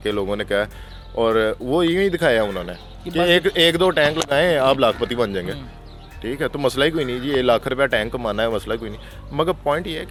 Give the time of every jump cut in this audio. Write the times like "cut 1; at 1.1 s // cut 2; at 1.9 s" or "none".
none